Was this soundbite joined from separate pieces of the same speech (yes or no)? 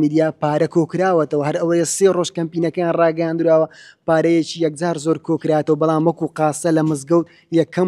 no